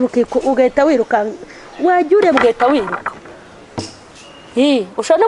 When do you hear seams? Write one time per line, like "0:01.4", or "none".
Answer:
none